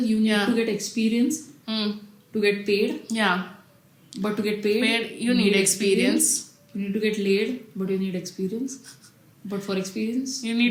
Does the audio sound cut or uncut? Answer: uncut